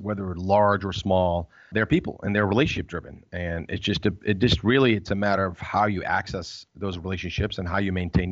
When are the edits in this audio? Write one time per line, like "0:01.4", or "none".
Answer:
0:01.7